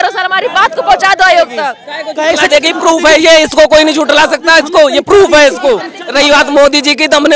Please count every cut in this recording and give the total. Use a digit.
2